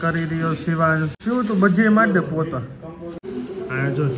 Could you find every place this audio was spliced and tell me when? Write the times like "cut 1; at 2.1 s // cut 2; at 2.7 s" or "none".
cut 1; at 1.2 s // cut 2; at 3.2 s

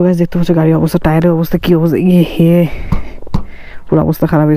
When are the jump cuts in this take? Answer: none

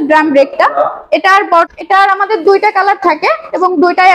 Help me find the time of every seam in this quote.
cut 1; at 1.7 s

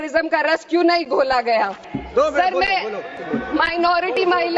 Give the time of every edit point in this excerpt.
cut 1; at 1.9 s

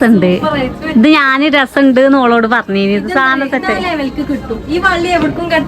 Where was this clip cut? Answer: none

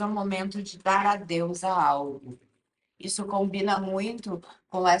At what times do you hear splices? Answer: none

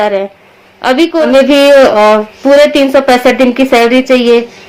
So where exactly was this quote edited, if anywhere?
cut 1; at 1.1 s

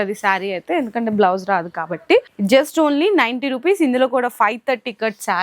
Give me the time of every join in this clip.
cut 1; at 2.3 s

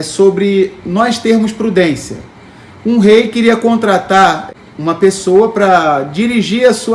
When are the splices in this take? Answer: cut 1; at 4.5 s

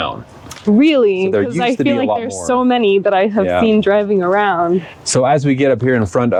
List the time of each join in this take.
none

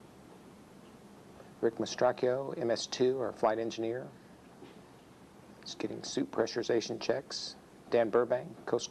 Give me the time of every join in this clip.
cut 1; at 2.9 s

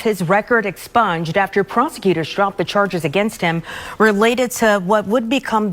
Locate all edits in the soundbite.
none

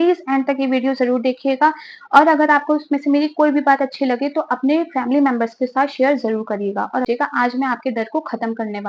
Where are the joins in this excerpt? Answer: cut 1; at 7.1 s

